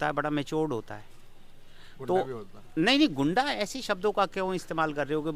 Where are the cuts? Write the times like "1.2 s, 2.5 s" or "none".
none